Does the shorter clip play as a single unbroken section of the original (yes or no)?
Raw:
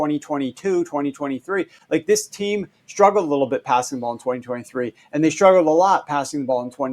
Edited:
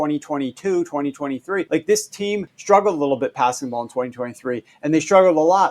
no